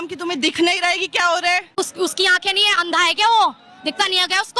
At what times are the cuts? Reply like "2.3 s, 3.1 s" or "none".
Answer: 1.7 s